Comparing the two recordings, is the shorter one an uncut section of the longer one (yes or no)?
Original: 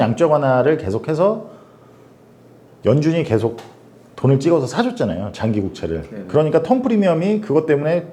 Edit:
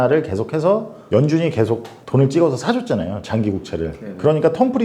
no